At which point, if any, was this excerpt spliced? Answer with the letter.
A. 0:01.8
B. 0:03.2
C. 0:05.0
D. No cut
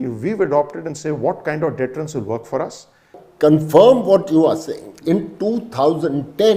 B